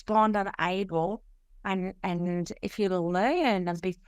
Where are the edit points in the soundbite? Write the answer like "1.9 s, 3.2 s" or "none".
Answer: none

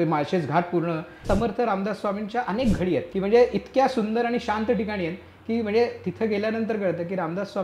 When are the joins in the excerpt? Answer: 1.2 s, 3.1 s

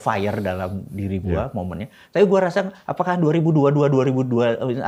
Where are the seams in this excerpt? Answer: none

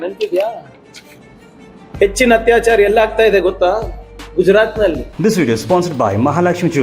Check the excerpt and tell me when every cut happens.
5.1 s

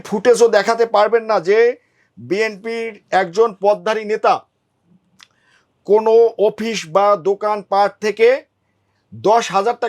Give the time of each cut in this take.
none

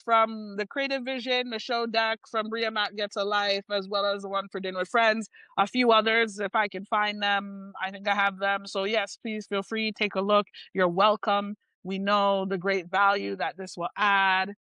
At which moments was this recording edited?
none

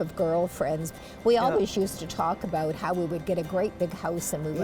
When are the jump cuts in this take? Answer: 1.0 s

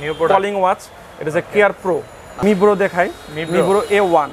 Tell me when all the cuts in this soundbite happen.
2.3 s

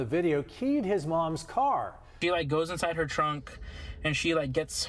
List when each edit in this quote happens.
2.0 s

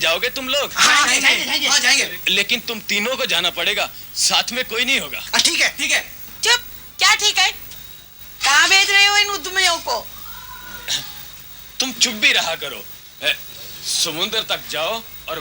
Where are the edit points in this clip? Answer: none

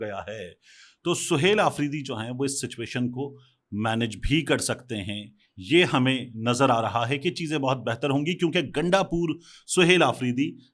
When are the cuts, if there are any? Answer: none

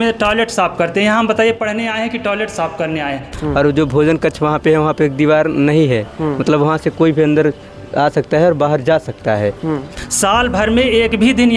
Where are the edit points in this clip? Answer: 3.3 s, 10.0 s

